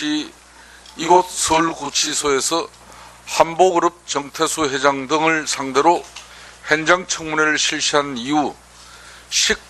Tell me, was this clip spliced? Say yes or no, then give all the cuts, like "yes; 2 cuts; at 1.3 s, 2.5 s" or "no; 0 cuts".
no; 0 cuts